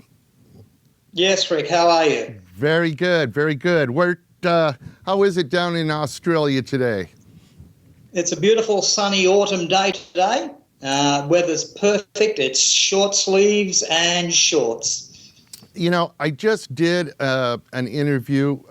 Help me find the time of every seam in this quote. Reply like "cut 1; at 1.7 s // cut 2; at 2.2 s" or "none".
cut 1; at 2.6 s